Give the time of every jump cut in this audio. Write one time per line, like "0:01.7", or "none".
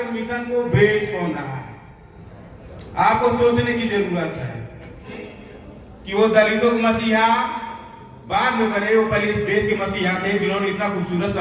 0:05.1